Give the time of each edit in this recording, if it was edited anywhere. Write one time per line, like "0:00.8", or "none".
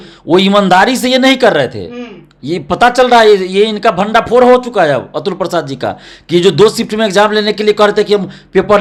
none